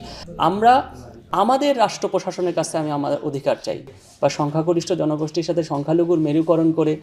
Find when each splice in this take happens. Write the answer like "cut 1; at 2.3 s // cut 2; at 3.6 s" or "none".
cut 1; at 4.0 s

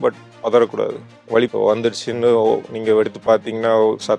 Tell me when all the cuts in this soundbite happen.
none

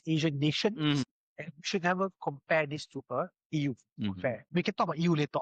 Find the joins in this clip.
cut 1; at 1.1 s // cut 2; at 4.4 s

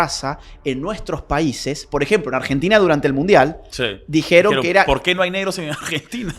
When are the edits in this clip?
none

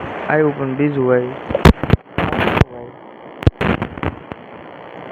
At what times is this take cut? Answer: none

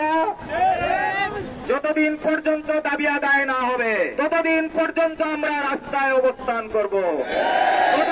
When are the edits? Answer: cut 1; at 1.5 s

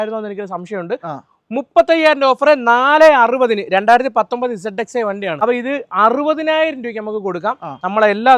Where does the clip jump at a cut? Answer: cut 1; at 5.4 s

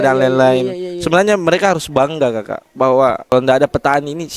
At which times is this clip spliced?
cut 1; at 3.2 s

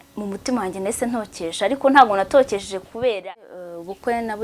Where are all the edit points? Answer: cut 1; at 3.3 s

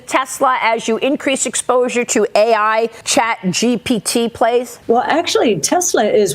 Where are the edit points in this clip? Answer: cut 1; at 3.0 s // cut 2; at 4.7 s

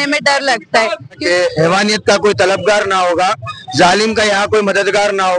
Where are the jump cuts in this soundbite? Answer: cut 1; at 1.2 s

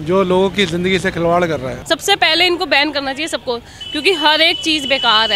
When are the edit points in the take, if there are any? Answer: cut 1; at 1.7 s

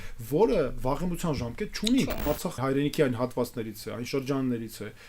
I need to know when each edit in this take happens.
cut 1; at 2.5 s

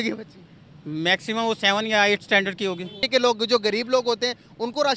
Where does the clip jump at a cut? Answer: cut 1; at 3.0 s

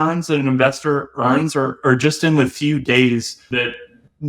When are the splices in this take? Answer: cut 1; at 3.4 s

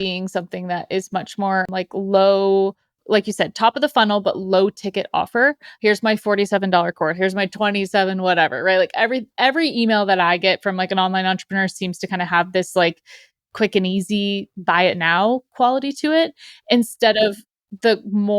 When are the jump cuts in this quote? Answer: cut 1; at 1.7 s // cut 2; at 3.0 s

